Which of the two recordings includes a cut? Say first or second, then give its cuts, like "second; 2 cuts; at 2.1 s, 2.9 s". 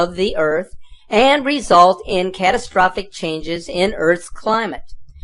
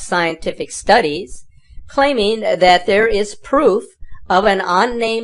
first; 1 cut; at 4.3 s